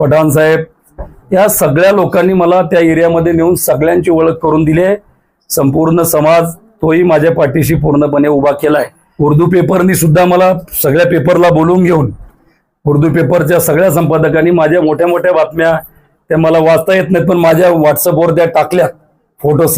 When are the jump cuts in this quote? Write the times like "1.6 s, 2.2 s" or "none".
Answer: 9.0 s